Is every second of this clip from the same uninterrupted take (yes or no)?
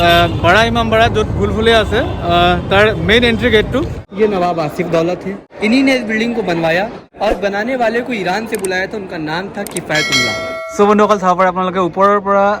no